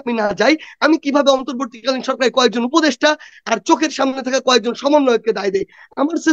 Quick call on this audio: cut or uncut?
uncut